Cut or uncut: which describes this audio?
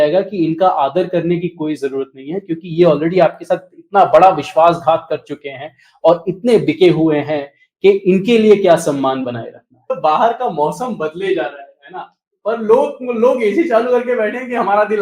cut